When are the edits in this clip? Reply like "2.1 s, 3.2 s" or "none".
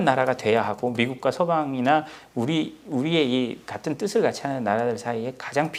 none